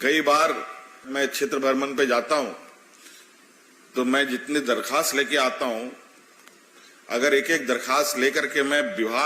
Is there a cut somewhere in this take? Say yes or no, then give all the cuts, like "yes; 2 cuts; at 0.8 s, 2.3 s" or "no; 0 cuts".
yes; 1 cut; at 1.1 s